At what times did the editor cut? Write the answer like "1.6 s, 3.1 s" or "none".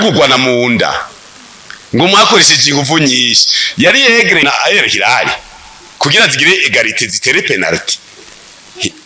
4.4 s

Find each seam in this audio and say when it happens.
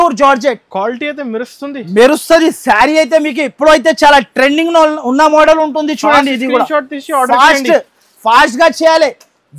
none

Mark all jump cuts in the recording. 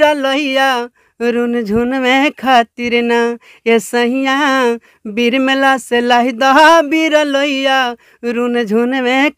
none

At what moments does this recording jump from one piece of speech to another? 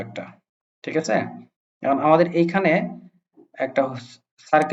none

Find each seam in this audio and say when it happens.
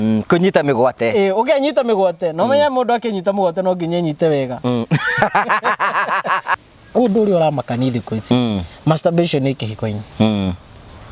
6.6 s

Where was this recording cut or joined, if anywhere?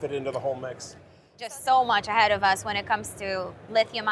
1.5 s

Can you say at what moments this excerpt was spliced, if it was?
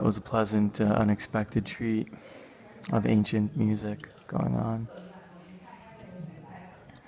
5.8 s

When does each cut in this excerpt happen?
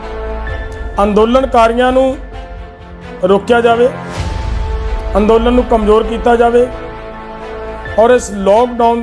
0.9 s

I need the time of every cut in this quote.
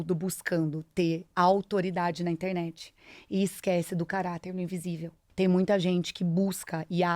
5.2 s

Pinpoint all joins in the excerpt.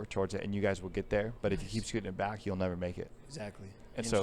none

